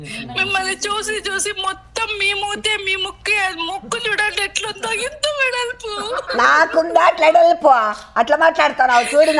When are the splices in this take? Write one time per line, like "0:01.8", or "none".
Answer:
none